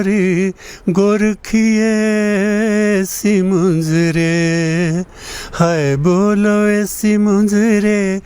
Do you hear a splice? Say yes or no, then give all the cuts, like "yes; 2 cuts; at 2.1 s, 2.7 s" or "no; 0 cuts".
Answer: no; 0 cuts